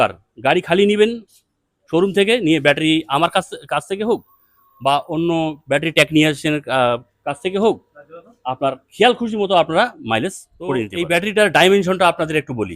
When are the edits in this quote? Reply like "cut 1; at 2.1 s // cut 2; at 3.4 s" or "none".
cut 1; at 10.9 s